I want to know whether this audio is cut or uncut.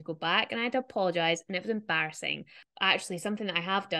cut